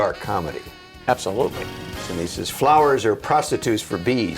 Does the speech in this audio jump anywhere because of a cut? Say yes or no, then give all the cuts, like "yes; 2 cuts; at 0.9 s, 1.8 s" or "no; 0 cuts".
yes; 1 cut; at 2.0 s